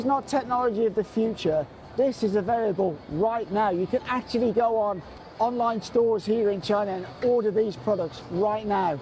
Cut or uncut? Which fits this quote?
uncut